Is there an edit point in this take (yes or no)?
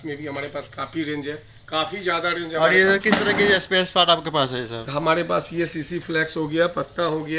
no